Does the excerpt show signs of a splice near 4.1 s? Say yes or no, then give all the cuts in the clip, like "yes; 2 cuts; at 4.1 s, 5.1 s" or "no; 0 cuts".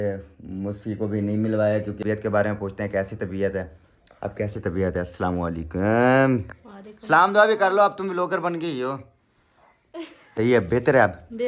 no; 2 cuts; at 2.0 s, 10.4 s